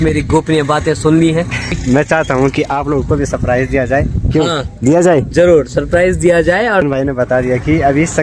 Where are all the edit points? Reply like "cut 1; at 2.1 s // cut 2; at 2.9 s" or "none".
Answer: cut 1; at 1.8 s // cut 2; at 6.8 s